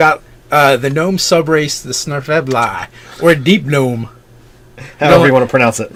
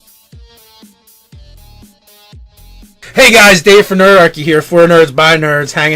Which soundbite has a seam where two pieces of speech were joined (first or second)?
second